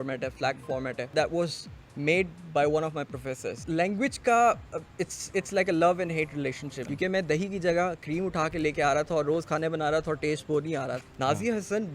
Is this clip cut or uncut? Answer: cut